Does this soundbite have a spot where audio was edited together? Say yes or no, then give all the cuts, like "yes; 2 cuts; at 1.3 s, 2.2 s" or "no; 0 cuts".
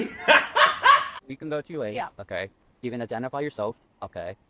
yes; 1 cut; at 1.1 s